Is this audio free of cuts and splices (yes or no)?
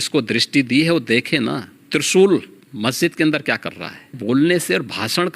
no